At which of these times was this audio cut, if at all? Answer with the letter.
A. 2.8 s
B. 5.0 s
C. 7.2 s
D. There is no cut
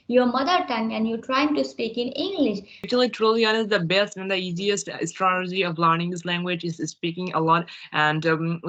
A